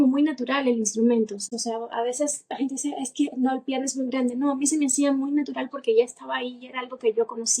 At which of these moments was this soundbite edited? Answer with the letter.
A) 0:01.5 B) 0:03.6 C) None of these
A